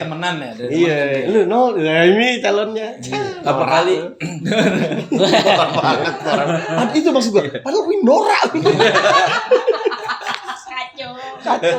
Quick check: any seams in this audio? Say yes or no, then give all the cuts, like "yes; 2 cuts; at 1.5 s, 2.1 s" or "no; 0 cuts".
no; 0 cuts